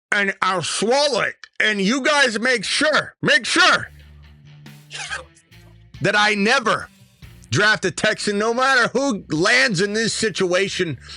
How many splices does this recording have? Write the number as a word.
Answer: zero